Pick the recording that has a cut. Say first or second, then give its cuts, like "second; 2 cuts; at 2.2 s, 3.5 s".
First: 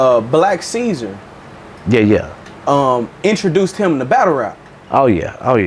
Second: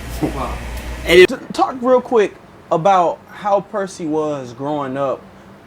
second; 1 cut; at 1.3 s